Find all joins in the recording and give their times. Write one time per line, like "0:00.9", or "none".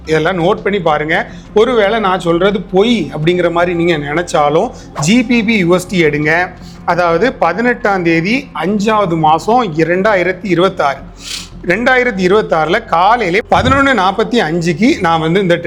none